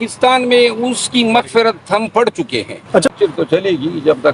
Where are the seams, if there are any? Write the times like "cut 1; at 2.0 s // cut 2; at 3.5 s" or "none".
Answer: cut 1; at 3.1 s